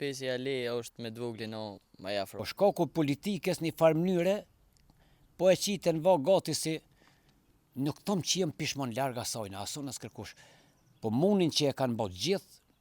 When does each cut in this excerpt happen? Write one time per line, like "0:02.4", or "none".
0:02.3